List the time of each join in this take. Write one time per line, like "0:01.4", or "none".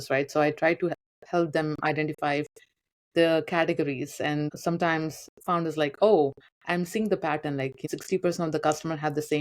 0:04.5
0:07.8